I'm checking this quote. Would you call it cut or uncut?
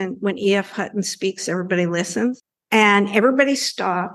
cut